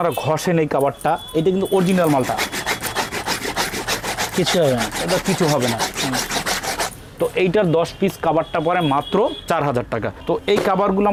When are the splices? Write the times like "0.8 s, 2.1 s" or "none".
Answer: none